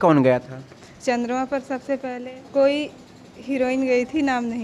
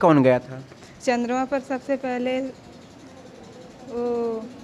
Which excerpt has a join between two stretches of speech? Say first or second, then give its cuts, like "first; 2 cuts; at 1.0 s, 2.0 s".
first; 1 cut; at 2.1 s